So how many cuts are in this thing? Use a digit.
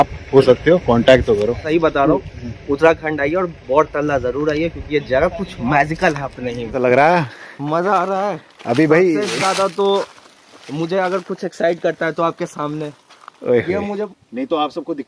3